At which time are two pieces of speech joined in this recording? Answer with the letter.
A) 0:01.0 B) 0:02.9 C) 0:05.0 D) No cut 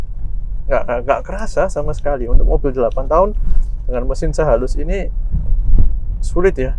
D